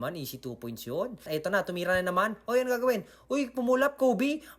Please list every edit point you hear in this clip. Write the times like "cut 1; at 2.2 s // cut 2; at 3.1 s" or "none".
cut 1; at 1.3 s

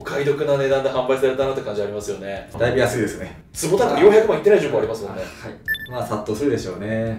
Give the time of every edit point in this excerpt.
none

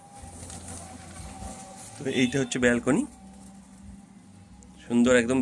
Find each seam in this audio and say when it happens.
none

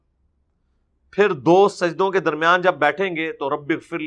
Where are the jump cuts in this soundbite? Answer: none

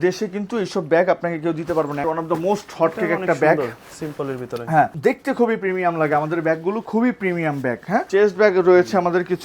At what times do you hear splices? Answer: cut 1; at 2.0 s // cut 2; at 4.9 s // cut 3; at 8.1 s

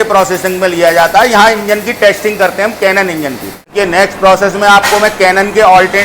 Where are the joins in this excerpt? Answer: none

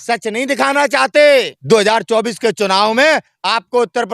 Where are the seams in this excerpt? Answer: cut 1; at 1.6 s

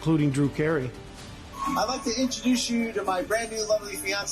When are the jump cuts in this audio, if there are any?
cut 1; at 1.1 s

